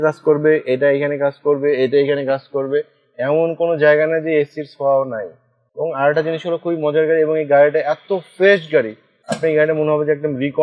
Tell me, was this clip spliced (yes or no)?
no